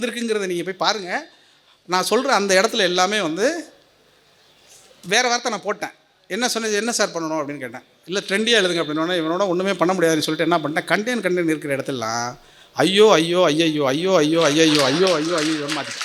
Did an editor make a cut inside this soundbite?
no; 0 cuts

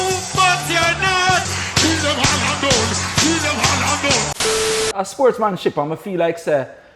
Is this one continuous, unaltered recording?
no; 2 cuts; at 1.5 s, 4.7 s

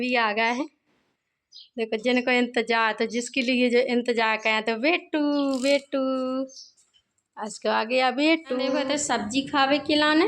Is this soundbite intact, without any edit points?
no; 1 cut; at 8.8 s

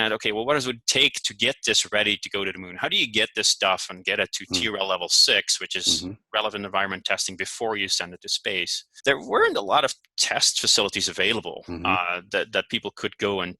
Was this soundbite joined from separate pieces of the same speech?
yes; 2 cuts; at 8.8 s, 10.1 s

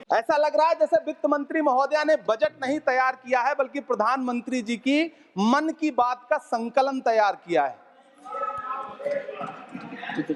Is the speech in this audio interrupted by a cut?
no; 0 cuts

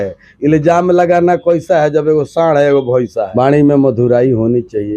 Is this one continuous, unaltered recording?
no; 1 cut; at 3.3 s

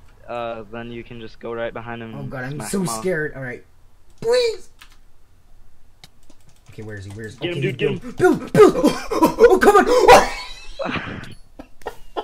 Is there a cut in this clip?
yes; 1 cut; at 9.9 s

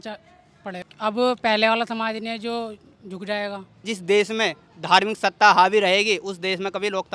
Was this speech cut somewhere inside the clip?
yes; 2 cuts; at 0.9 s, 3.9 s

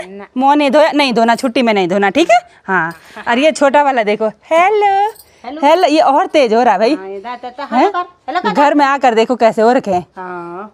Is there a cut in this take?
no; 0 cuts

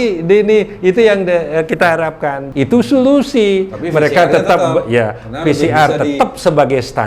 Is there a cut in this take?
yes; 1 cut; at 2.4 s

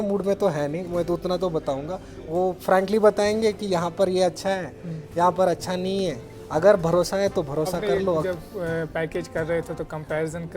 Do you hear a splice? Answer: yes; 1 cut; at 8.2 s

